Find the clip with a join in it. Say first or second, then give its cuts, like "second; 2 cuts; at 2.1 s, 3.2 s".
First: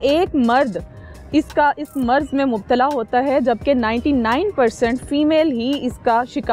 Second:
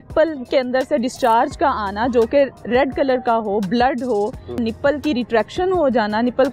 second; 1 cut; at 4.6 s